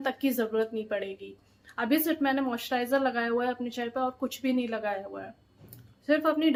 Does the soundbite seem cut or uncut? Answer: uncut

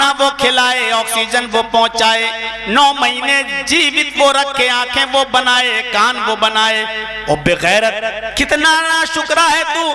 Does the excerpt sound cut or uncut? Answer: uncut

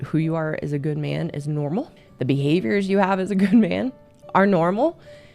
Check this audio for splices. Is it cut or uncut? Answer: cut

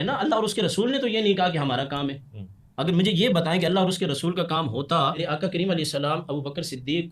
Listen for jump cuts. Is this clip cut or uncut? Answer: cut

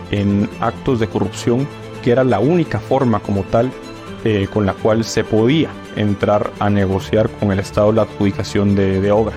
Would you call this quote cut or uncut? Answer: uncut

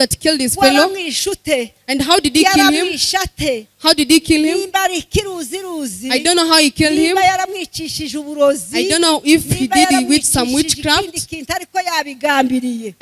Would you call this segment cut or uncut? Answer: uncut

